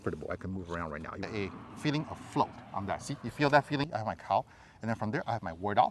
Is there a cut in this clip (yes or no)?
yes